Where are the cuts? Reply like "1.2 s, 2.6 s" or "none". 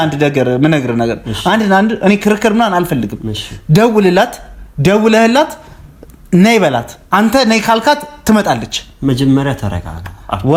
none